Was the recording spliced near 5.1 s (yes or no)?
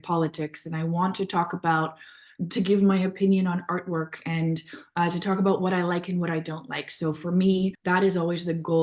no